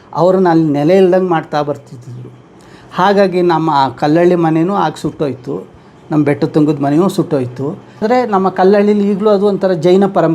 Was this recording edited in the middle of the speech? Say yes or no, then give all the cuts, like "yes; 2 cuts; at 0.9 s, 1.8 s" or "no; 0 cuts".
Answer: yes; 1 cut; at 8.0 s